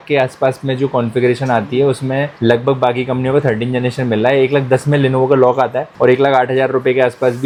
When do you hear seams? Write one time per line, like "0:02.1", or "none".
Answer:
none